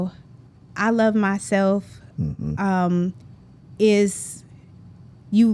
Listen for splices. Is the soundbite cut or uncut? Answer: uncut